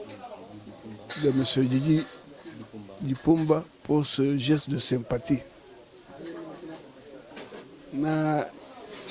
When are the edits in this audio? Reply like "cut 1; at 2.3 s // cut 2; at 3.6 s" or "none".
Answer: none